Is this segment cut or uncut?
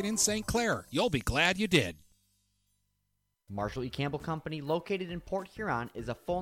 cut